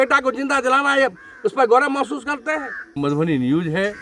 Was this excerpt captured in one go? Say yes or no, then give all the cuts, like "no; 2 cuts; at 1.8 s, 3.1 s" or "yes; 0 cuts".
no; 1 cut; at 3.0 s